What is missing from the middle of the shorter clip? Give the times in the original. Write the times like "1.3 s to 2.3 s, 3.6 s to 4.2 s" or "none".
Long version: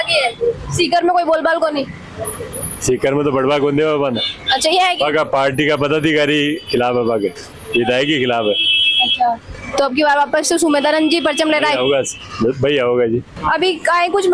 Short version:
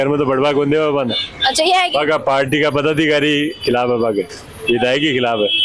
none